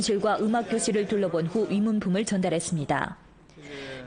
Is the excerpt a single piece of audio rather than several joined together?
yes; 0 cuts

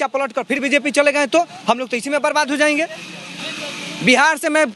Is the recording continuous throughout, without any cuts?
yes; 0 cuts

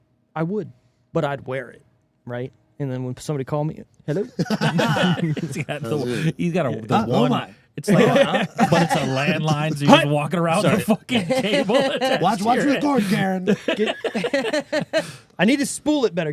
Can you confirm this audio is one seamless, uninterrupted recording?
yes; 0 cuts

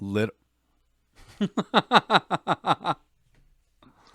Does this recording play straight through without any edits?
yes; 0 cuts

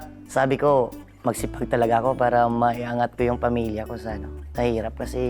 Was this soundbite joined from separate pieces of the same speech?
no; 0 cuts

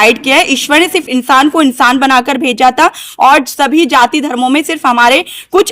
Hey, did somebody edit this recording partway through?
no; 0 cuts

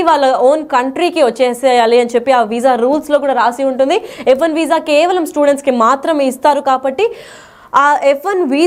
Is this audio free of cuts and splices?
yes; 0 cuts

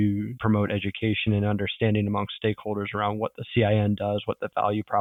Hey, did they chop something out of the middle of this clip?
no; 0 cuts

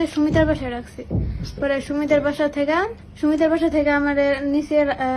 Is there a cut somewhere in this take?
yes; 1 cut; at 3.0 s

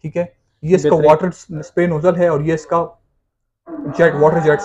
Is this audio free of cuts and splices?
yes; 0 cuts

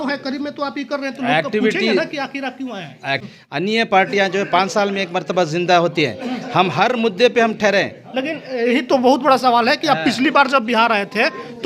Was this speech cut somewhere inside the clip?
yes; 1 cut; at 3.2 s

